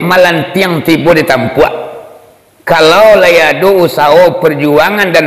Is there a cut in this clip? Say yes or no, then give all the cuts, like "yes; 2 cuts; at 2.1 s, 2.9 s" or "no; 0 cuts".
no; 0 cuts